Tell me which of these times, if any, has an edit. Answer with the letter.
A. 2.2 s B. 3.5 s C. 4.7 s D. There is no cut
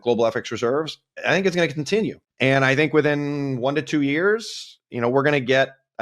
A